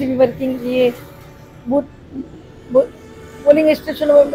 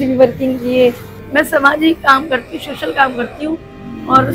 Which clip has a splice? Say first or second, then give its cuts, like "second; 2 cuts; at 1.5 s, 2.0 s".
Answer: second; 1 cut; at 1.2 s